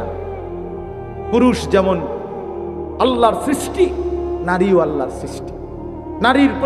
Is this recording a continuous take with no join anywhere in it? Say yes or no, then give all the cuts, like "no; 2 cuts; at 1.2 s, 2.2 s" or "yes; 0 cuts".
yes; 0 cuts